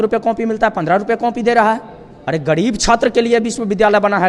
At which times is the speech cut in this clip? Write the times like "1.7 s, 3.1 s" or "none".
none